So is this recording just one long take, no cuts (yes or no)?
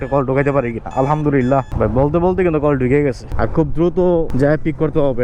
no